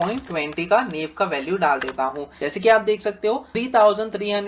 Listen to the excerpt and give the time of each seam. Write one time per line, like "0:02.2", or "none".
0:02.3
0:03.5

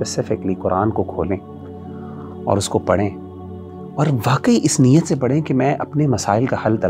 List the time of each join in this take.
none

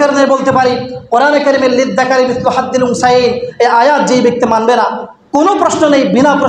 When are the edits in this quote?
none

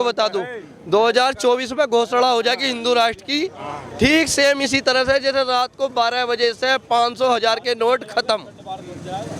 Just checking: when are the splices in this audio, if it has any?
none

